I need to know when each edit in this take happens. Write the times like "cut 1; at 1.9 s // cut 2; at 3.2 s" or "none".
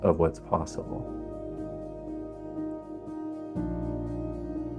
cut 1; at 0.9 s